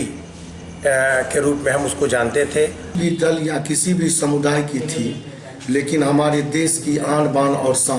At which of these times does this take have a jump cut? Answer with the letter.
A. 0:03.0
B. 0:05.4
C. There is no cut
A